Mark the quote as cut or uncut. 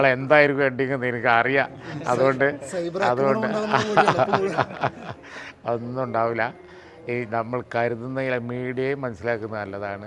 uncut